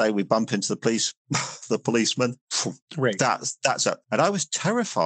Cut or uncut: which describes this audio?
cut